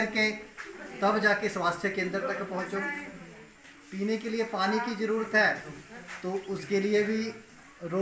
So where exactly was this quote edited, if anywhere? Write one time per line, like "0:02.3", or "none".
none